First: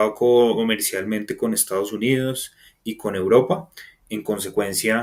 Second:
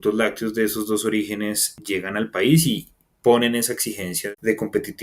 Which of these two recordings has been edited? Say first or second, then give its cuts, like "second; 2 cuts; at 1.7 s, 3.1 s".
second; 2 cuts; at 1.7 s, 4.1 s